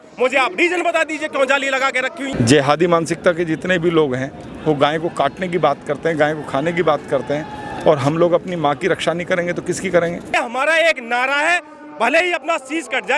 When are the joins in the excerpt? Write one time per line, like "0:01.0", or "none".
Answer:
0:02.3
0:10.3